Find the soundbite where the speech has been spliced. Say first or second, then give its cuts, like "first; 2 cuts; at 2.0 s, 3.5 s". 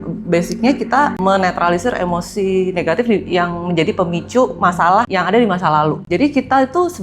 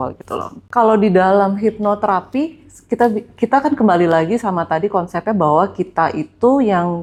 first; 3 cuts; at 1.2 s, 5.1 s, 6.0 s